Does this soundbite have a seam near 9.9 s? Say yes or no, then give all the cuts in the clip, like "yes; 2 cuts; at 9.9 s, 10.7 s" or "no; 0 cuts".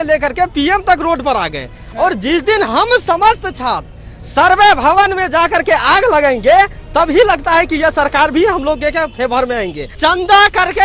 yes; 1 cut; at 9.9 s